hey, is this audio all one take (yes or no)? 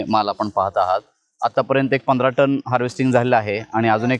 yes